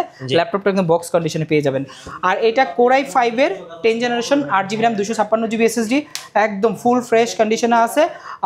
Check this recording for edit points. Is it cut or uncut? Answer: uncut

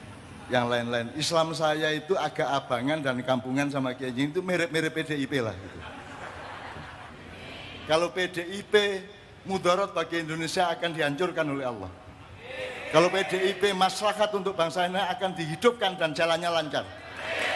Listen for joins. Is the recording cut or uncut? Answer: cut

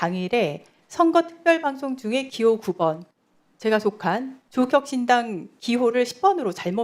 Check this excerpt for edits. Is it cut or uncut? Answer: uncut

